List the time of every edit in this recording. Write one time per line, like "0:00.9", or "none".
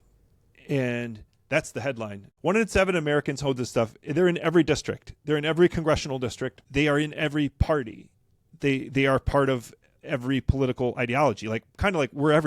0:02.2
0:06.6